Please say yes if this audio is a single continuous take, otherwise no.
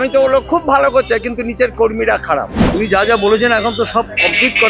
no